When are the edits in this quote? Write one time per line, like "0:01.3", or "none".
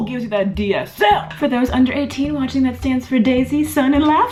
none